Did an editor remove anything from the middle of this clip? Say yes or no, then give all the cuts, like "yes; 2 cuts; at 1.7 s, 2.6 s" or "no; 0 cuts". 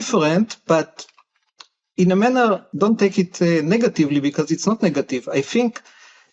yes; 1 cut; at 2.7 s